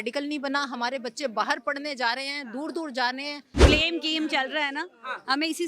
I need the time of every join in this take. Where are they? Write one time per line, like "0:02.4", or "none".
0:03.6